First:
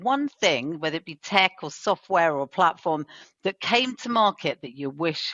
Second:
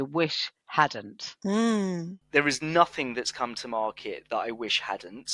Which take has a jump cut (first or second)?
second